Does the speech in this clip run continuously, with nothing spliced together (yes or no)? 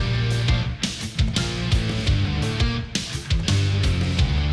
yes